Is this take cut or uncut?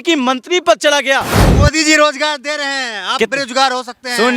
cut